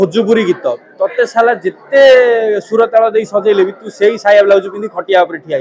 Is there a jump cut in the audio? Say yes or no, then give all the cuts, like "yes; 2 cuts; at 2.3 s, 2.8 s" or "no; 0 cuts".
no; 0 cuts